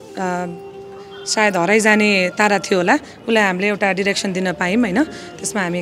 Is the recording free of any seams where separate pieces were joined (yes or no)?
yes